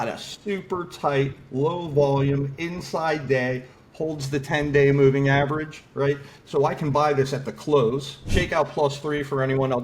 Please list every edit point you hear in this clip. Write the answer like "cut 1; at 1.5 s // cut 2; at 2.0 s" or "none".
cut 1; at 8.2 s